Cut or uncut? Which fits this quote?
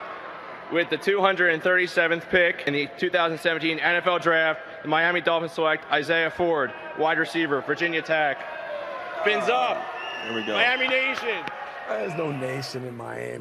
cut